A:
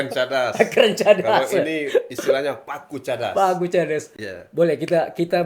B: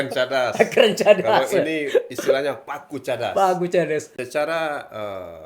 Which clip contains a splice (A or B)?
B